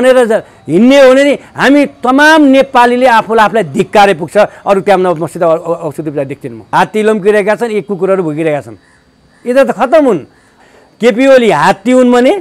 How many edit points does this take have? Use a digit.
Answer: 2